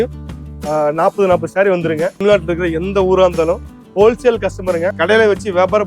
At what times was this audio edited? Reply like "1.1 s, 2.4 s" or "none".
2.2 s, 5.0 s